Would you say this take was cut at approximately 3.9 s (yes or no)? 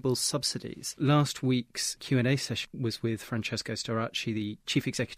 no